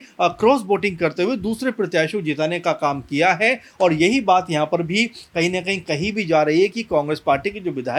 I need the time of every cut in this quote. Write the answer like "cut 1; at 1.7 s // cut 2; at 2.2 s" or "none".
none